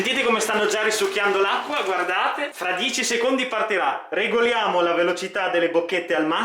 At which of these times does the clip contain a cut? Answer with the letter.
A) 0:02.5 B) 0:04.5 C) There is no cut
A